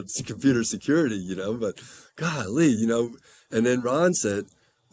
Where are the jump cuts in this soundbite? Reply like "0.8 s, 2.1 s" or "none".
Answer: none